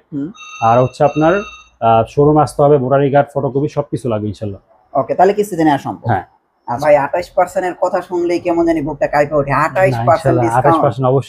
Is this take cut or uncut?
uncut